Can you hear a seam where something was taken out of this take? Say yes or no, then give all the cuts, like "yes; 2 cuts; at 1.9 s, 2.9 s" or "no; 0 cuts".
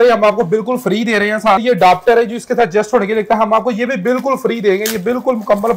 yes; 1 cut; at 1.6 s